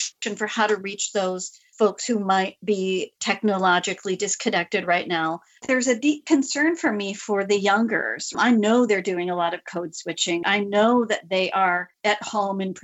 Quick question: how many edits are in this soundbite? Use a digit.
2